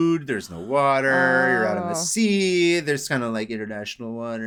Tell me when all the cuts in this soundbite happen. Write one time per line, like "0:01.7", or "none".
none

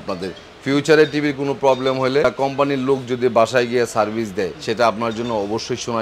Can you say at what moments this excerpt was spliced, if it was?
0:02.2
0:04.6

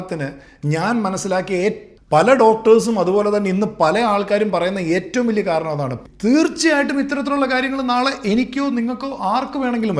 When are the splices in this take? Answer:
0:01.9
0:06.0

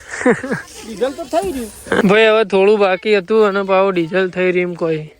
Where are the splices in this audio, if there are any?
0:02.0

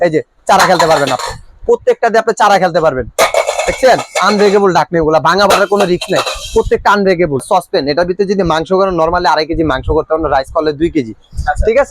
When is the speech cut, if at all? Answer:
0:07.4

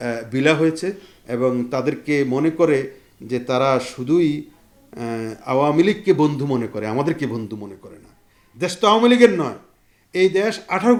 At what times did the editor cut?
none

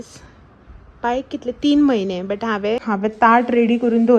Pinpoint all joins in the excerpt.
0:02.8

